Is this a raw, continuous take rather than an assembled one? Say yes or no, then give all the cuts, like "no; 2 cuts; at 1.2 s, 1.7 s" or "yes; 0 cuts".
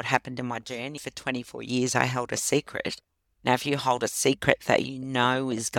no; 1 cut; at 1.0 s